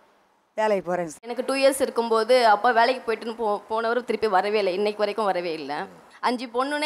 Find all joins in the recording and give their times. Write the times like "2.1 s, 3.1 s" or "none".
1.2 s, 5.9 s